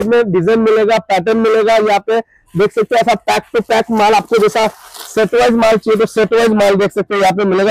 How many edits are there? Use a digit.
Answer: 0